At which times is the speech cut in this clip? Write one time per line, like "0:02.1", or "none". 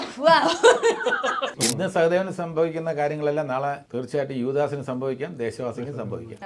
0:01.5
0:03.9